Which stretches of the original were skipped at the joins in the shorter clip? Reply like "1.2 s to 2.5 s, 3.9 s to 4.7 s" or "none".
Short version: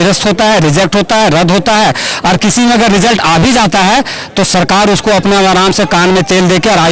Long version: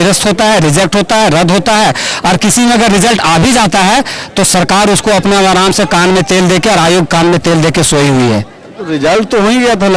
none